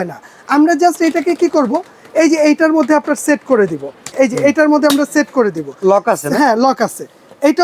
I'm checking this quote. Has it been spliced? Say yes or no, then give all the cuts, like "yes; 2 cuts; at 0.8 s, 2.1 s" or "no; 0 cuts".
yes; 1 cut; at 4.1 s